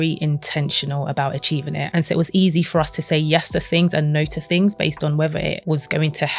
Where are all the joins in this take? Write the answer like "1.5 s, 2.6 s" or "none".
1.8 s, 5.6 s